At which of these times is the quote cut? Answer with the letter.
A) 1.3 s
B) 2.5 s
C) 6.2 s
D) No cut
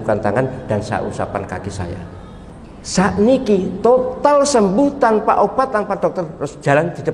B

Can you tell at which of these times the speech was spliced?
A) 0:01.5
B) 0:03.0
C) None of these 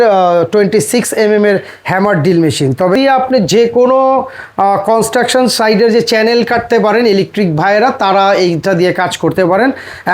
B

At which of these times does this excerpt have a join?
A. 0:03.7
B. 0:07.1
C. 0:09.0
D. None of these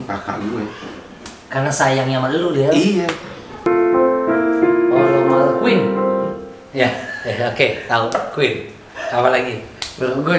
A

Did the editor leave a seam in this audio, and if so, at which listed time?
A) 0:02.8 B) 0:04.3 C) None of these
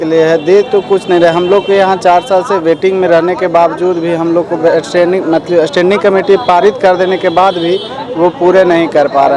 C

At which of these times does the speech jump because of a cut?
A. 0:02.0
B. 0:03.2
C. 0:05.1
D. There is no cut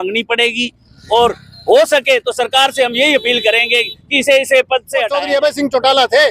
C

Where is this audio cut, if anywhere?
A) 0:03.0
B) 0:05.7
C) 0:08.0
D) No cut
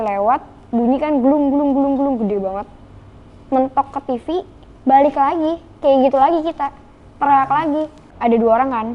C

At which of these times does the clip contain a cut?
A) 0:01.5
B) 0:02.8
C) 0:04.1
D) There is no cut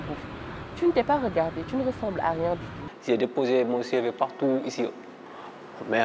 B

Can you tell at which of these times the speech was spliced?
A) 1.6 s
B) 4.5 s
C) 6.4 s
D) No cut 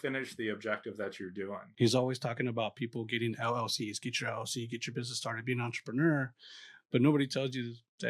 A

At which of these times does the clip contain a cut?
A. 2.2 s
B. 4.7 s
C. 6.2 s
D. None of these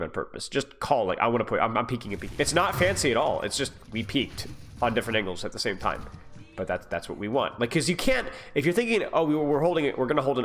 A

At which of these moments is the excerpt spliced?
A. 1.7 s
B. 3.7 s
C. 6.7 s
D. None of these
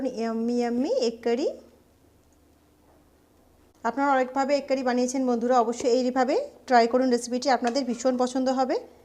B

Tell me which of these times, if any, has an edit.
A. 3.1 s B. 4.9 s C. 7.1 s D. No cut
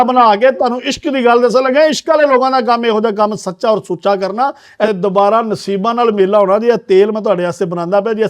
B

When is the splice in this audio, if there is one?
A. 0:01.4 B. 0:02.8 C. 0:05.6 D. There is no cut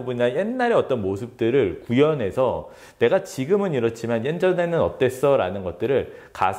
D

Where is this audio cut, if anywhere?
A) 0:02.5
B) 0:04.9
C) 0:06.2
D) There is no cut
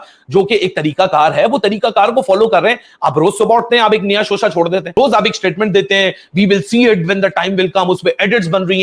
B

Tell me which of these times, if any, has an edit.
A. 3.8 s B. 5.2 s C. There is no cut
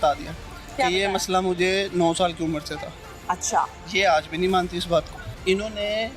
B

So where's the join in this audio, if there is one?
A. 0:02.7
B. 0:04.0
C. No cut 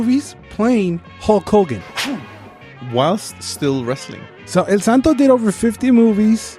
A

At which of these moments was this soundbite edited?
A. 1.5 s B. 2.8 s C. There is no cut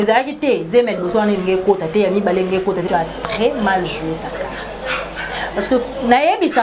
B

